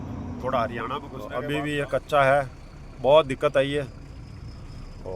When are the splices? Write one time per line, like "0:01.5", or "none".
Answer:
0:01.2